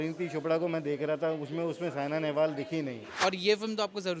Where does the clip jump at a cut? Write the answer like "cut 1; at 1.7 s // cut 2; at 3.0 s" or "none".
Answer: cut 1; at 3.1 s